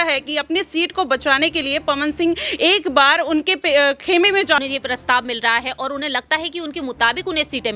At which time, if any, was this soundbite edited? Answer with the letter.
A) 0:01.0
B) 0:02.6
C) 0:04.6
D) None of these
C